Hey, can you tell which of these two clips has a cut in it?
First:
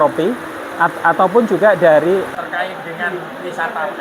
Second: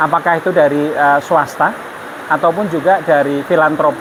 first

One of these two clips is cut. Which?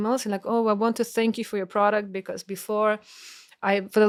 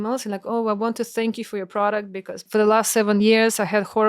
second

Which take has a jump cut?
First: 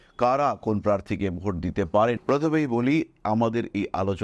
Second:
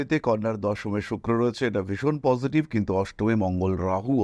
first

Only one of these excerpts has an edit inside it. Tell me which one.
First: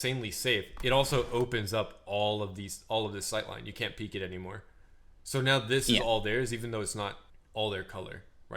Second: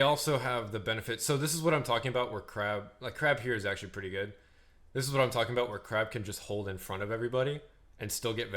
first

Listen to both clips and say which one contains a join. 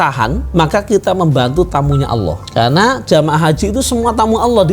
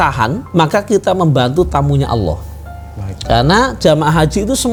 first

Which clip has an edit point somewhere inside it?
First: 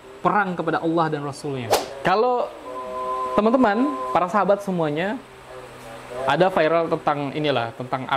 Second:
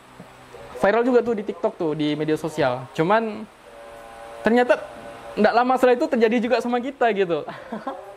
first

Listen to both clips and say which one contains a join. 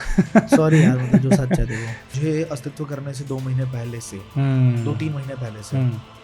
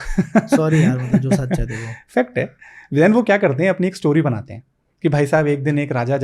first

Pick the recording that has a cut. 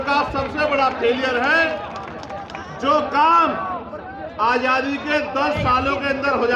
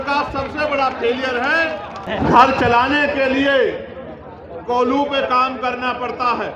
second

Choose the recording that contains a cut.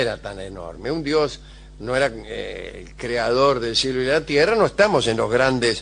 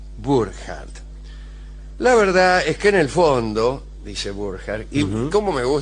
second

